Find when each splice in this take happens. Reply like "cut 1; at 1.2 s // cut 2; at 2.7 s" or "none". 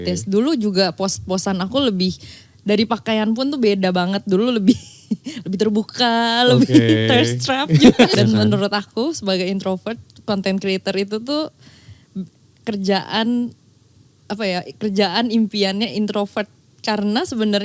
cut 1; at 8.1 s